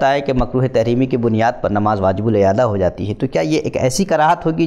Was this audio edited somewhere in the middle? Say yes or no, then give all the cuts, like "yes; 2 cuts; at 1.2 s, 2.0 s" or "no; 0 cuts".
no; 0 cuts